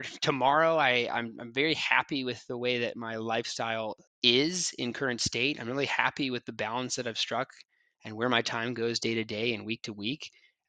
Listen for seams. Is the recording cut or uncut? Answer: cut